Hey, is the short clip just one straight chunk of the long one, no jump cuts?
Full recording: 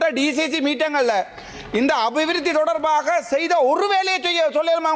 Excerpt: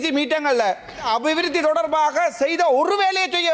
no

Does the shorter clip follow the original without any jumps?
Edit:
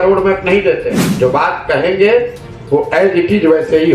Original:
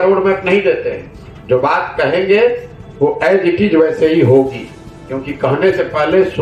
no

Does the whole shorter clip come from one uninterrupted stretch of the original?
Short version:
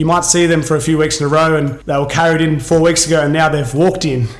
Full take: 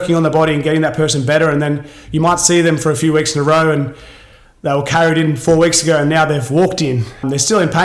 no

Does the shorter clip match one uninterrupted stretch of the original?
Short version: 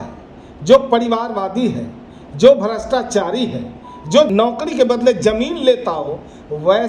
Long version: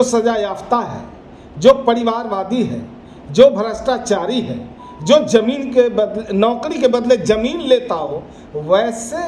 no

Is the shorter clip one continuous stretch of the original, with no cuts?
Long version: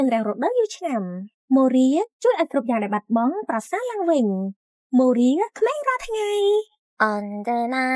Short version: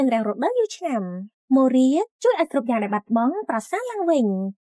yes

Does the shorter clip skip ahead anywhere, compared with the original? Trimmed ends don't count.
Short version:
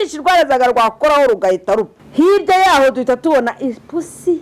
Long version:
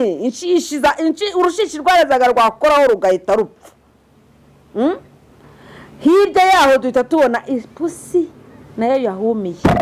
yes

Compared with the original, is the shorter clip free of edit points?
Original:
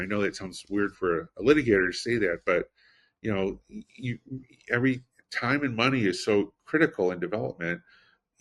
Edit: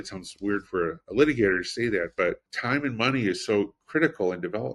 no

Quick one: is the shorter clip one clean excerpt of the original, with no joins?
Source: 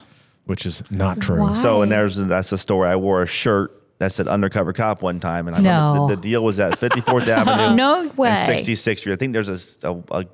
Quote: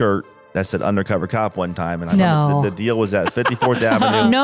yes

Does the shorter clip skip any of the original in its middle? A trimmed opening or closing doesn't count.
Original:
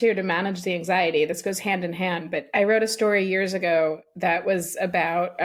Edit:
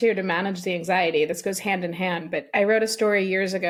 no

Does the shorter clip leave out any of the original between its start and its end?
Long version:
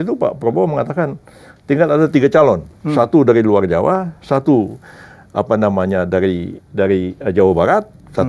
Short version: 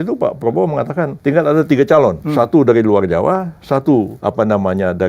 yes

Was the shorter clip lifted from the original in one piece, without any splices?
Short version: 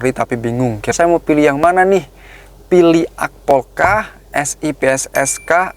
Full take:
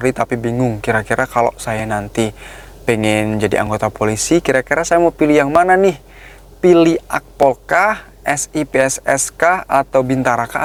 no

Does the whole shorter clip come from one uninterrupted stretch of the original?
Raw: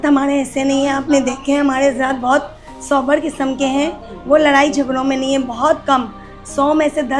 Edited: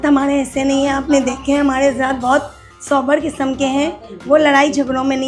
yes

